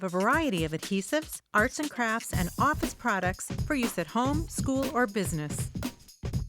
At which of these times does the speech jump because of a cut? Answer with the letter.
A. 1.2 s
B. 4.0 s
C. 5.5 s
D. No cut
C